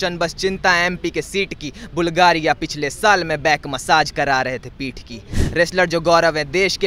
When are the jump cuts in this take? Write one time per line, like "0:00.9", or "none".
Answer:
0:05.4